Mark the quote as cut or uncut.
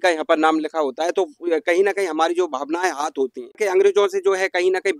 cut